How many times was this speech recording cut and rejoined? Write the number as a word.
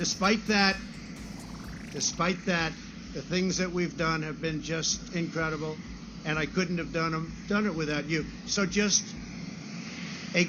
zero